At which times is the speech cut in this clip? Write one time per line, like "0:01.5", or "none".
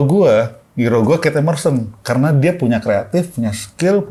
none